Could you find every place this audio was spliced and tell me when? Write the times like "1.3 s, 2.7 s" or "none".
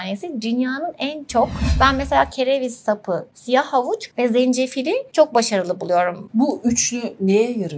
1.6 s, 3.3 s, 4.1 s, 5.1 s, 6.2 s